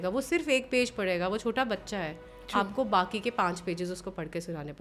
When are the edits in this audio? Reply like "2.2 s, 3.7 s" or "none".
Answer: none